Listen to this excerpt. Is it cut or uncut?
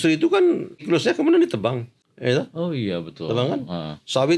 cut